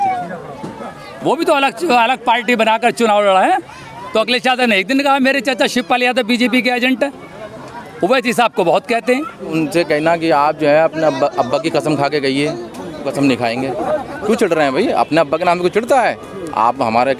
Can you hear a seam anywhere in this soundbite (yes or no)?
yes